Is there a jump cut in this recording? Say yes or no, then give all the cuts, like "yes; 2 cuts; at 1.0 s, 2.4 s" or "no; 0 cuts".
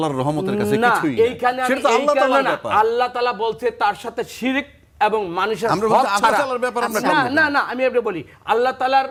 no; 0 cuts